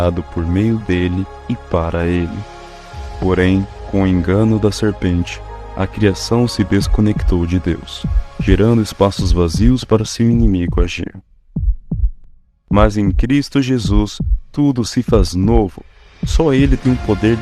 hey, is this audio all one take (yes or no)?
no